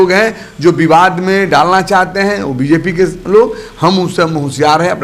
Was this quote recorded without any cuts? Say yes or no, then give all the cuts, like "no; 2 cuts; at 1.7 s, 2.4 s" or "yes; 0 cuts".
yes; 0 cuts